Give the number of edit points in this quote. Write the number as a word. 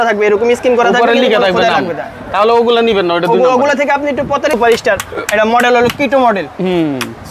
one